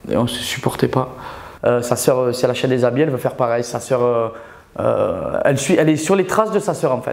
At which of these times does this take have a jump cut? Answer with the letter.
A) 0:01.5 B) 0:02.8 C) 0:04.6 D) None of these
A